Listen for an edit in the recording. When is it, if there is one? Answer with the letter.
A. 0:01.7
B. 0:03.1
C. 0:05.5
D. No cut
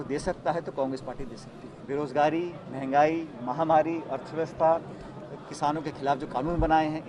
A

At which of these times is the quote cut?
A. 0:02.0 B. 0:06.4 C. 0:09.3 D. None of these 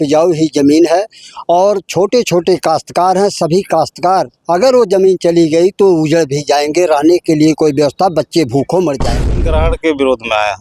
C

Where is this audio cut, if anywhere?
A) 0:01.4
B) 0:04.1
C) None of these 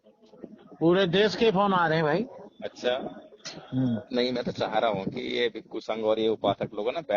B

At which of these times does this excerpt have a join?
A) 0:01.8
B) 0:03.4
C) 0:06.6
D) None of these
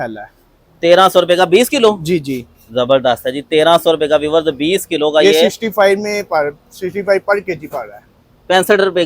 D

